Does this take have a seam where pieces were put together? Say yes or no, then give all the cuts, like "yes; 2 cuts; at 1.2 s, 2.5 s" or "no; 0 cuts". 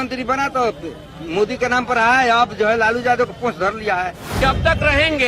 yes; 1 cut; at 4.2 s